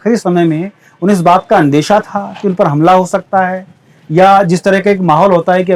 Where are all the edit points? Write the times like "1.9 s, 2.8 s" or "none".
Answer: none